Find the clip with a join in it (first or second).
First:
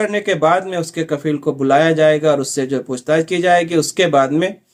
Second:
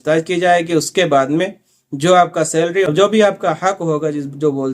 second